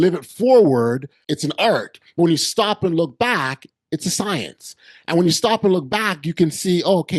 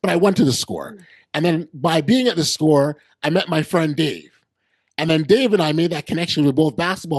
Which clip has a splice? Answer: first; 1 cut; at 1.2 s

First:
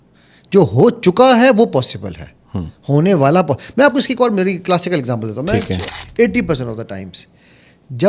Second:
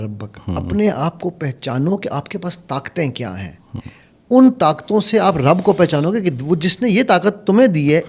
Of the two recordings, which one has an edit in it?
first; 1 cut; at 6.0 s

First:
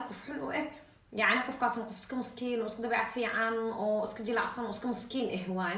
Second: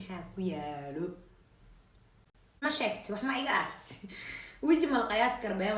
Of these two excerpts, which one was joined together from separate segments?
second; 1 cut; at 2.6 s

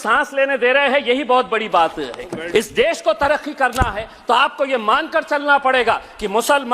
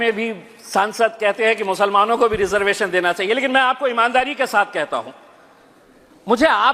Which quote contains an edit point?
first; 1 cut; at 2.3 s

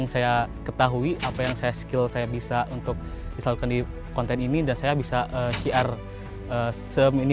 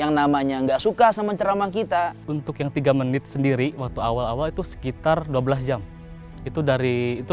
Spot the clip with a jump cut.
second; 1 cut; at 2.2 s

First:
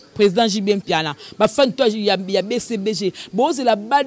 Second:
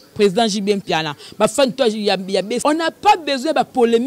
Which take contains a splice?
second; 1 cut; at 2.6 s

